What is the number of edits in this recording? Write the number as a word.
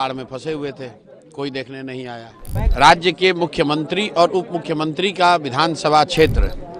one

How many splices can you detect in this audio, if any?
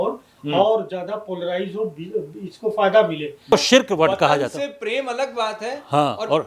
one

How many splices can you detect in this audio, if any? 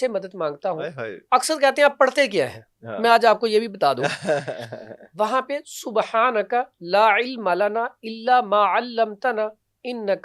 zero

